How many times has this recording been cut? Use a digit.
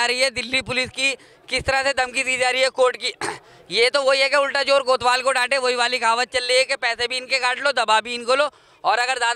0